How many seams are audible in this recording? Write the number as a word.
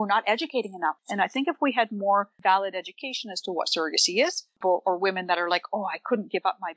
one